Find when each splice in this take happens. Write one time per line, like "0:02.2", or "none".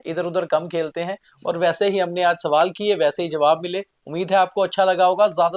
none